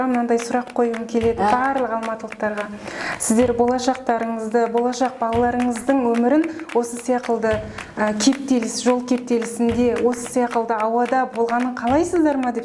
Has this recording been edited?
no; 0 cuts

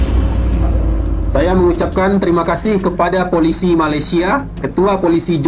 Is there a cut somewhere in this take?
yes; 1 cut; at 1.2 s

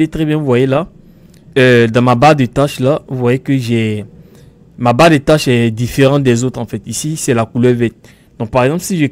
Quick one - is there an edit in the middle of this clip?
no; 0 cuts

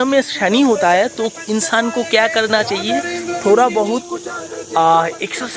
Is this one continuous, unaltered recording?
yes; 0 cuts

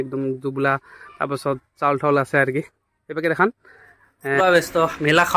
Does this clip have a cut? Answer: yes; 1 cut; at 4.4 s

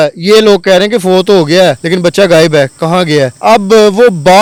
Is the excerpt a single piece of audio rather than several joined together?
yes; 0 cuts

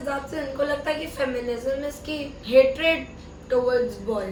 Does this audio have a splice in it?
no; 0 cuts

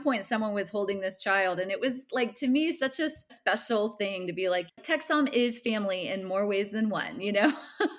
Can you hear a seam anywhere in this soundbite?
yes; 2 cuts; at 3.4 s, 4.7 s

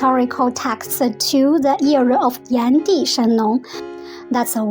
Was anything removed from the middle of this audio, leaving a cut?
yes; 1 cut; at 3.8 s

